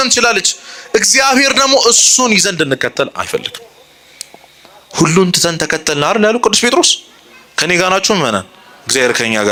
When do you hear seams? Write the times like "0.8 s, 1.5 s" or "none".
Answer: none